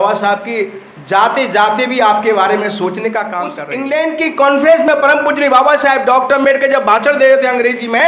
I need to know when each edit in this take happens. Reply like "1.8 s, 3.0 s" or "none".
3.6 s